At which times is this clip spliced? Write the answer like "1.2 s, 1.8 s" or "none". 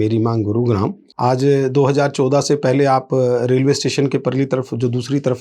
1.0 s